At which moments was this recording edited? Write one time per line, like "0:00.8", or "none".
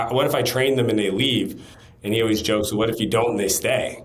none